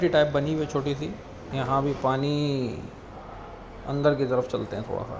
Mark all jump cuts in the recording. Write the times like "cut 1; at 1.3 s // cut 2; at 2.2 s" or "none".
cut 1; at 1.4 s